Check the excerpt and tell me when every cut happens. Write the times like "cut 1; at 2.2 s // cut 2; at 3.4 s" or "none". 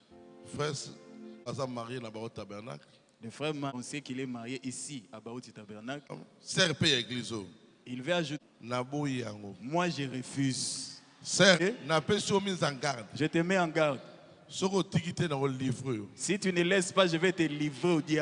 cut 1; at 1.5 s // cut 2; at 3.7 s // cut 3; at 6.1 s // cut 4; at 8.4 s // cut 5; at 11.6 s